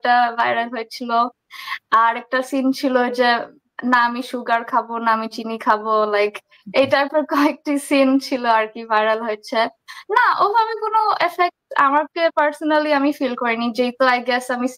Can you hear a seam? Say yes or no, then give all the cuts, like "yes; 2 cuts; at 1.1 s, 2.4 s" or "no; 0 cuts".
no; 0 cuts